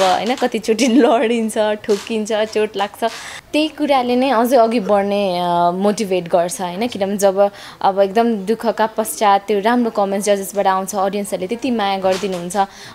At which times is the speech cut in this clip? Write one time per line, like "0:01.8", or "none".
0:03.3